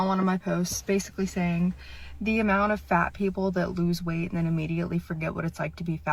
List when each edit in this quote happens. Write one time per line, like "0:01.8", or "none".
none